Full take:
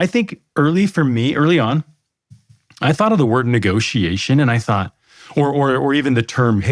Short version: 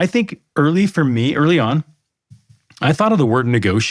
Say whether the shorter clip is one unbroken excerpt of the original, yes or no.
yes